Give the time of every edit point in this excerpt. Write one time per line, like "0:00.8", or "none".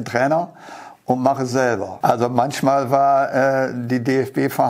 0:01.9